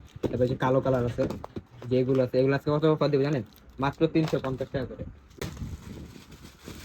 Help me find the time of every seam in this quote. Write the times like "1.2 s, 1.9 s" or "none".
5.4 s